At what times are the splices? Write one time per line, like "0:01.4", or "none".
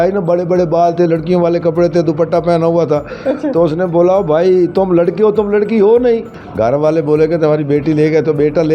0:06.4

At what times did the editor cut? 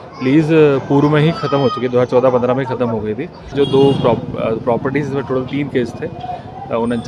0:03.5

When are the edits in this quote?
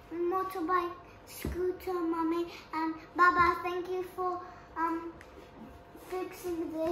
none

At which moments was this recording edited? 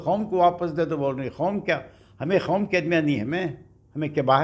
none

